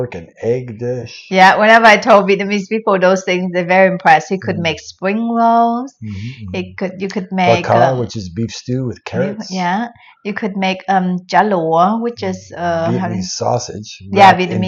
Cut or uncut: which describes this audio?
uncut